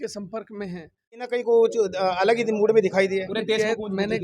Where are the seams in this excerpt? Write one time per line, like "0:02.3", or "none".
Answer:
0:01.3

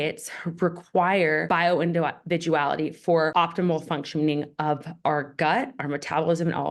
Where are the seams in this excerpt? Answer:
0:01.4
0:03.3

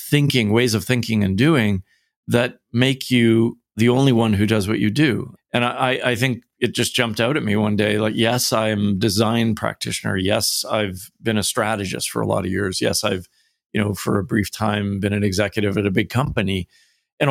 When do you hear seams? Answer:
0:03.7
0:05.3

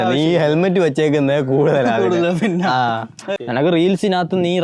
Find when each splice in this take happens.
0:03.4

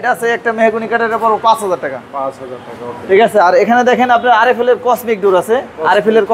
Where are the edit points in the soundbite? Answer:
none

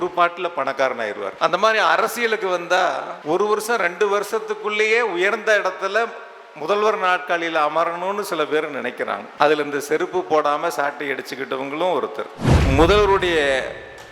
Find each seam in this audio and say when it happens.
0:01.3
0:03.1
0:09.3
0:12.5

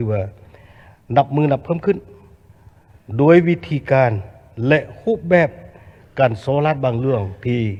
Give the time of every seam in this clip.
none

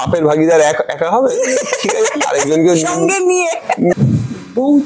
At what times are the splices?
0:03.9

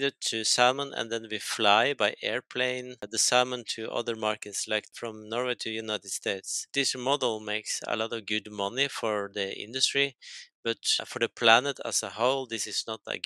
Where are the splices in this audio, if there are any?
0:04.9
0:06.6

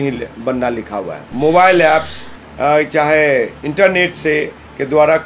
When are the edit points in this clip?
0:01.2

